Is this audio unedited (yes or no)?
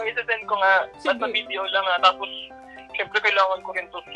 yes